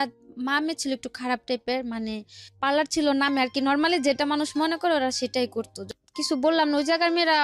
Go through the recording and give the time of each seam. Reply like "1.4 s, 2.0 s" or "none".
5.8 s